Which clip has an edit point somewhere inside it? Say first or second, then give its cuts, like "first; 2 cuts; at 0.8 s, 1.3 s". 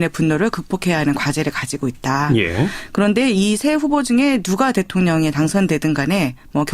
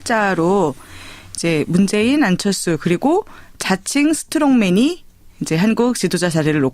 first; 1 cut; at 1.7 s